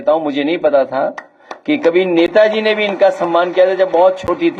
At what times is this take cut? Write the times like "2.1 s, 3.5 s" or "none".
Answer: none